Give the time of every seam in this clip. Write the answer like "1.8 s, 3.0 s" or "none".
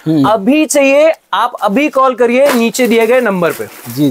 none